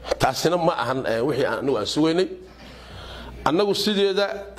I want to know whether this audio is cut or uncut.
uncut